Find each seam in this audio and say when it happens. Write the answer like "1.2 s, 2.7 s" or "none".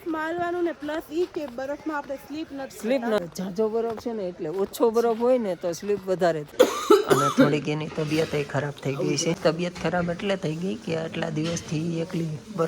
3.2 s, 6.4 s, 9.4 s